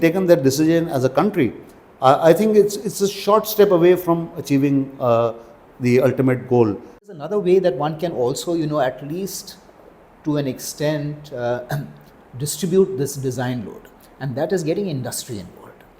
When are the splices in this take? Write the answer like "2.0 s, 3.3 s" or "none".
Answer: 7.1 s